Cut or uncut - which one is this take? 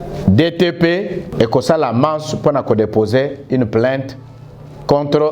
cut